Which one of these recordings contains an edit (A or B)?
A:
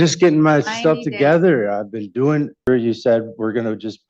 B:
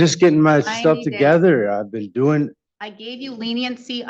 A